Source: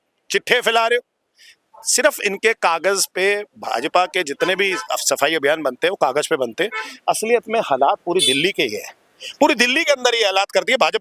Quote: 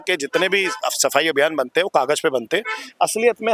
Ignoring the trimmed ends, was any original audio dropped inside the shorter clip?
no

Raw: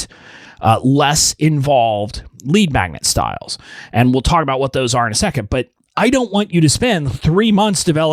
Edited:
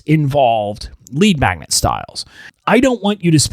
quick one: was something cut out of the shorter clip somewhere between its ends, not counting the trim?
yes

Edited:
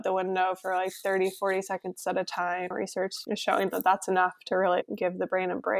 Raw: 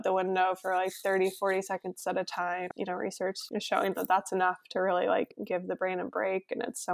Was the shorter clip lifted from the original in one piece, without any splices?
no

